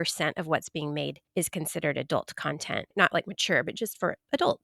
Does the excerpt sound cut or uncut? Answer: cut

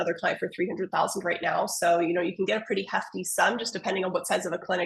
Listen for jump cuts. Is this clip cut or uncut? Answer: uncut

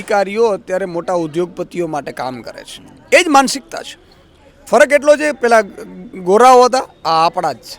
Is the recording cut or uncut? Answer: uncut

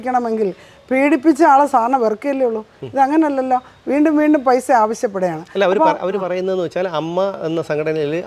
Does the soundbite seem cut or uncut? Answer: uncut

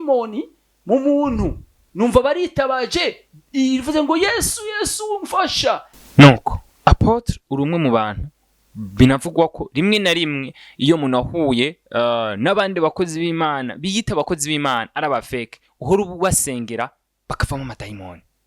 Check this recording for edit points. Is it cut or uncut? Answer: cut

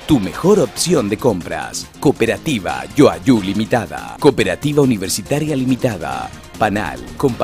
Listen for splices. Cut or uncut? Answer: uncut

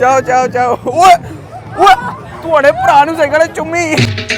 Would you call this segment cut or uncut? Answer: uncut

